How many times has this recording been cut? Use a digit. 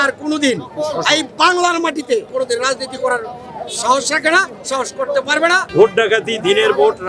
2